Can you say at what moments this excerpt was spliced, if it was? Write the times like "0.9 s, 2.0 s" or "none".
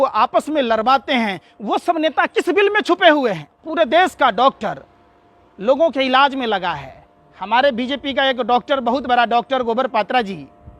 3.6 s